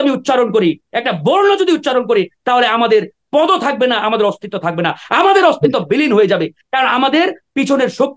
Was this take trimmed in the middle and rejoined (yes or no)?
no